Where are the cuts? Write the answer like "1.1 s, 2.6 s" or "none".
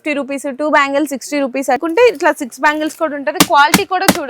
1.8 s